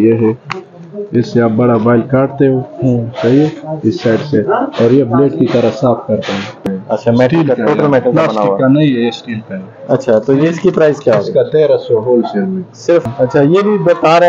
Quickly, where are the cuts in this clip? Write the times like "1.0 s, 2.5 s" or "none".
6.6 s, 13.1 s